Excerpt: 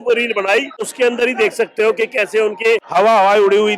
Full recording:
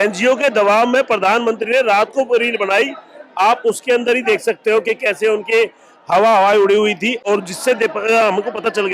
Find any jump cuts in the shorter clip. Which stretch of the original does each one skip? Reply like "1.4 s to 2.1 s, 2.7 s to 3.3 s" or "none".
3.1 s to 3.8 s, 5.7 s to 6.0 s